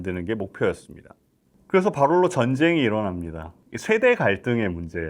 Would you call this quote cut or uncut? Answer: cut